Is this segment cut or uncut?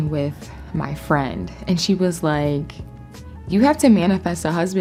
uncut